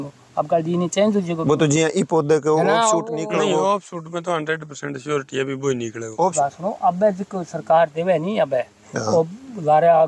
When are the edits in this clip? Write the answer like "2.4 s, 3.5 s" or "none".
6.3 s